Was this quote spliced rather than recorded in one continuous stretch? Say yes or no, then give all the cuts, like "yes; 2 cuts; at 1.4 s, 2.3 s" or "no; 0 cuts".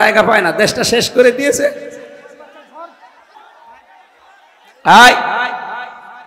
yes; 1 cut; at 3.3 s